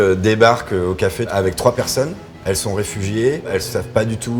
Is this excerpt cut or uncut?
cut